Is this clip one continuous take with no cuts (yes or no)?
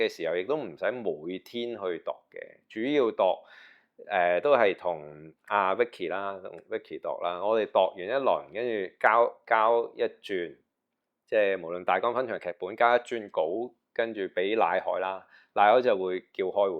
yes